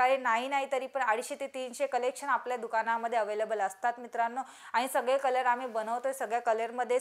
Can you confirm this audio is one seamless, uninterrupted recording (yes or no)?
yes